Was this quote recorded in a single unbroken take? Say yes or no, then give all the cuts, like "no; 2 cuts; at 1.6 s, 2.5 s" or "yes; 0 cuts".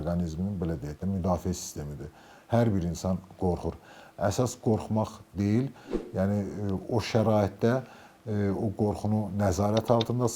yes; 0 cuts